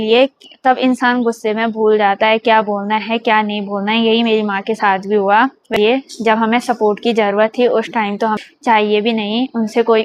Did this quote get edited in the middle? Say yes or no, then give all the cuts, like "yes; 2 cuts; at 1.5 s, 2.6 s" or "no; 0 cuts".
yes; 2 cuts; at 5.7 s, 8.4 s